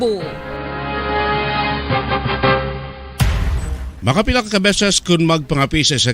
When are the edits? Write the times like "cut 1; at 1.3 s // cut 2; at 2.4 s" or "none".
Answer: cut 1; at 3.0 s